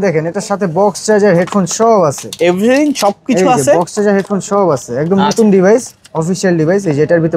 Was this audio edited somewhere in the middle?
no; 0 cuts

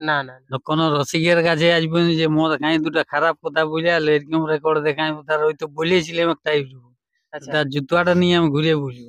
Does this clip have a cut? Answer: no; 0 cuts

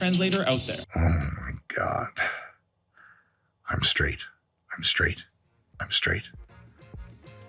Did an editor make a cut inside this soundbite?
no; 0 cuts

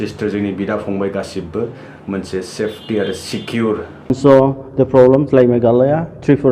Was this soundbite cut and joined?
yes; 1 cut; at 4.1 s

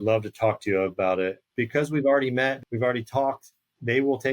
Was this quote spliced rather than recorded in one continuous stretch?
yes; 2 cuts; at 1.4 s, 2.6 s

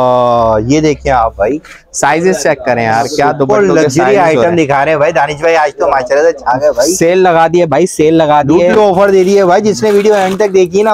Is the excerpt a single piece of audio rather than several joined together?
yes; 0 cuts

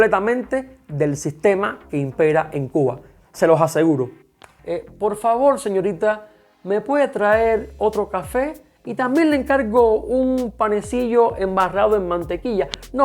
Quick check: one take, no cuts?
no; 1 cut; at 4.6 s

